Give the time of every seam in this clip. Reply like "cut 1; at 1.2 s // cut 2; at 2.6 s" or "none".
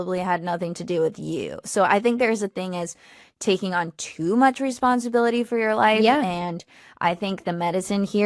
none